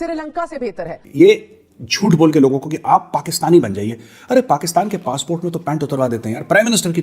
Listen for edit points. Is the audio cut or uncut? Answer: cut